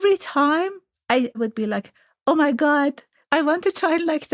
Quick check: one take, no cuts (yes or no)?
no